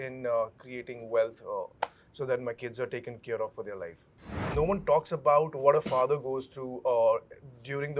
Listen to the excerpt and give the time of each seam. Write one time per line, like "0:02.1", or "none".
0:04.5

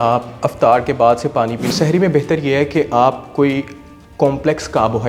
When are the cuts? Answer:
0:01.7

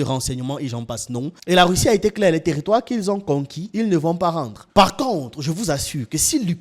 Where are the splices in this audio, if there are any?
0:01.3
0:04.6

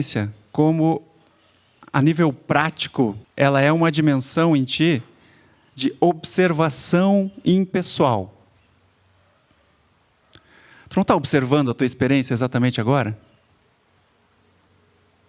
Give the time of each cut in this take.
none

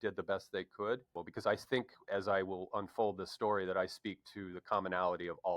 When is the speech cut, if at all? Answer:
0:01.2

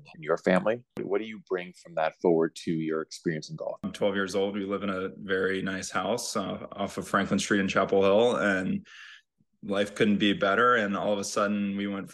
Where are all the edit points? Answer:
0:01.0
0:03.8

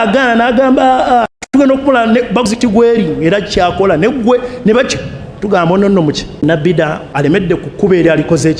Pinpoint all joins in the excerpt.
0:01.0
0:06.4
0:07.0

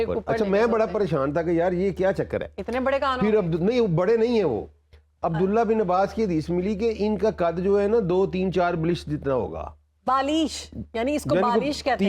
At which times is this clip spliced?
none

